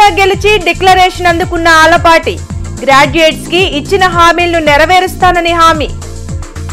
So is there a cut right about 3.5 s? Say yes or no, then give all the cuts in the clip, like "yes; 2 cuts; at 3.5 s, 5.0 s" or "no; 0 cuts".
no; 0 cuts